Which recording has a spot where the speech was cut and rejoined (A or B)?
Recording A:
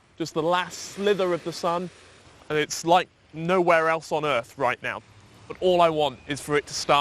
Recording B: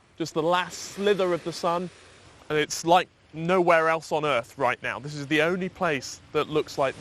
A